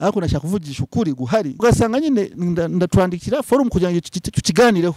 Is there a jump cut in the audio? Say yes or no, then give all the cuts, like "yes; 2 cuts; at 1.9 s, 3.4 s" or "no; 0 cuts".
yes; 1 cut; at 1.6 s